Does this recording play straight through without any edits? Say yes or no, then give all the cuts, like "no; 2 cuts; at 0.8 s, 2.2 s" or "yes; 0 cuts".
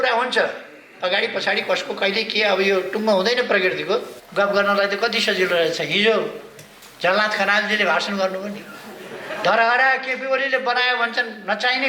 no; 1 cut; at 4.2 s